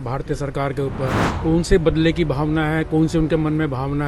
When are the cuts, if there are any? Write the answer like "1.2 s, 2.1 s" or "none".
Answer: 1.3 s